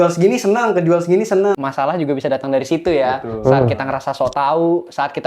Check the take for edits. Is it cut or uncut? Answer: cut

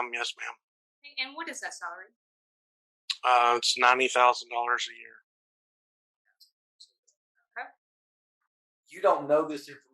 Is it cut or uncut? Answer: cut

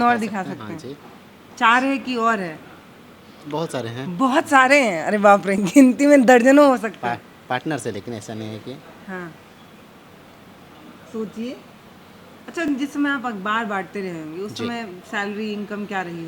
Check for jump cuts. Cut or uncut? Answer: uncut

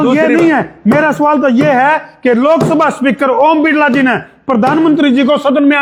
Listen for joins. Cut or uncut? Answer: uncut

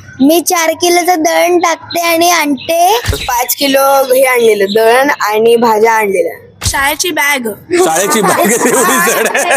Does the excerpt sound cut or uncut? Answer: cut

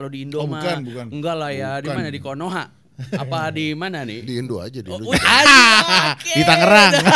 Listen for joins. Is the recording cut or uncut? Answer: uncut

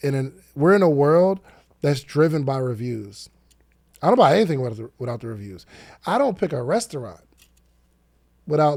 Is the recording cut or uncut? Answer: uncut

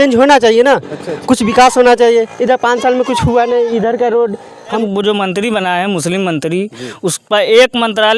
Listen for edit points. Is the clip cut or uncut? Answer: cut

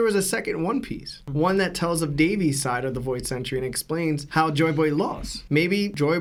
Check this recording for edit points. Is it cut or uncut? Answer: uncut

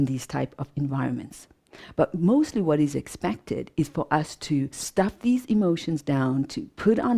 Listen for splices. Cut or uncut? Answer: cut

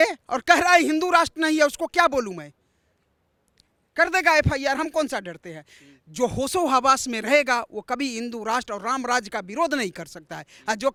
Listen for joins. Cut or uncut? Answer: uncut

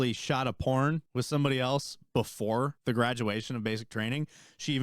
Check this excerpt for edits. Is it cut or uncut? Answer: cut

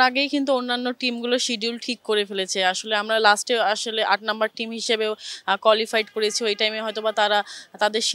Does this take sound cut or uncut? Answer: uncut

